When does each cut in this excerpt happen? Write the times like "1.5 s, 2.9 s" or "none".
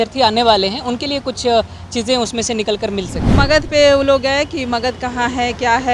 3.3 s

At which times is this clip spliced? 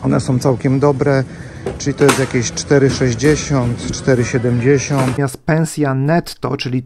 5.2 s

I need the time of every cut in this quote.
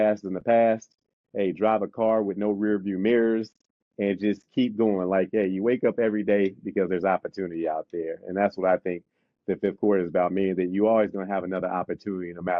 none

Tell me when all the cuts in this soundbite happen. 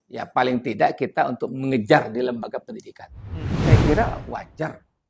3.5 s

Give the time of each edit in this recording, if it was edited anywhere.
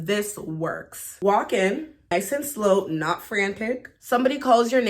1.0 s, 2.1 s, 3.9 s

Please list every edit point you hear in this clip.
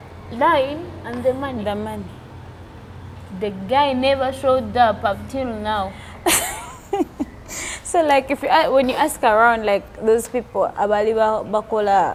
none

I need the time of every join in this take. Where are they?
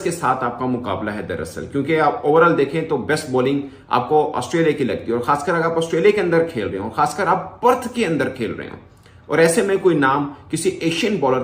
none

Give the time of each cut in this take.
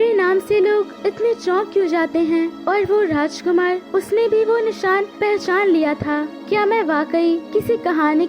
0.9 s, 2.6 s, 3.8 s, 5.1 s, 6.3 s, 7.4 s

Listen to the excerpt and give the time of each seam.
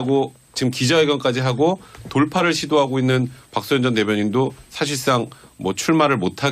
3.3 s

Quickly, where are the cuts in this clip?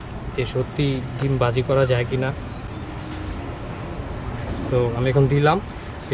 none

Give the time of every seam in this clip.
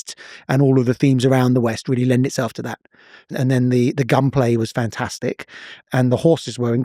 3.3 s, 5.8 s

